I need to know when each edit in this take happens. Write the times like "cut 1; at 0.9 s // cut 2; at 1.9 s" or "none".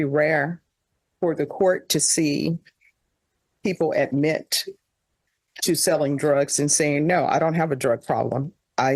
none